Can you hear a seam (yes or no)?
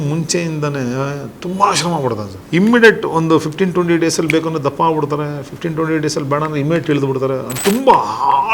yes